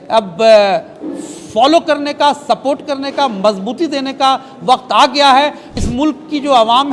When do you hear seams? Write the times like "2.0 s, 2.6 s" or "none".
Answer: 5.7 s